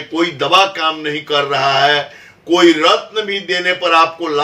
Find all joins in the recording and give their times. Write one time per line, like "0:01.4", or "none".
none